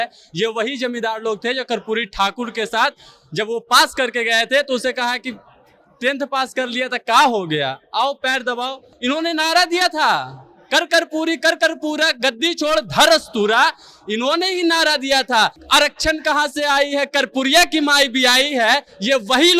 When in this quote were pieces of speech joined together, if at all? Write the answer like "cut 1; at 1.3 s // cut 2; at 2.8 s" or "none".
cut 1; at 8.9 s // cut 2; at 15.6 s